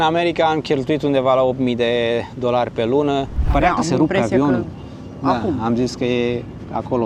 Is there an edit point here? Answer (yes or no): yes